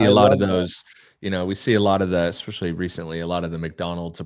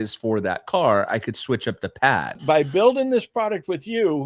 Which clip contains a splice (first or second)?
second